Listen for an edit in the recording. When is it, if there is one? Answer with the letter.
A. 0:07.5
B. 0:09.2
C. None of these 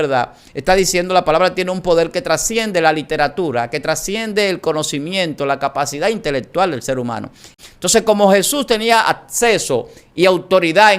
A